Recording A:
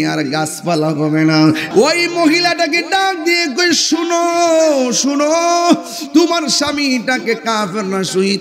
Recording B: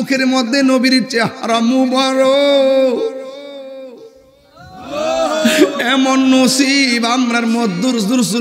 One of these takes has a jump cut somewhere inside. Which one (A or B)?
A